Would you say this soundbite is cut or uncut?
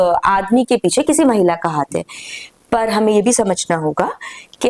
uncut